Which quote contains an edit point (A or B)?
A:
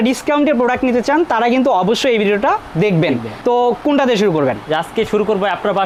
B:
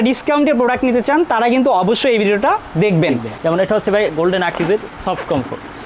B